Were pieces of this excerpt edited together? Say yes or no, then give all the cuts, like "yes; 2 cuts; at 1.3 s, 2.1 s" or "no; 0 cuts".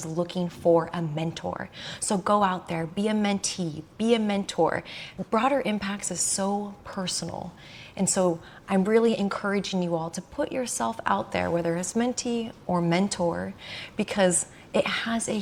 no; 0 cuts